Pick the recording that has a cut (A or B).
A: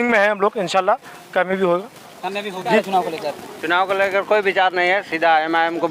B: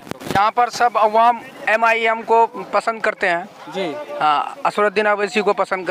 A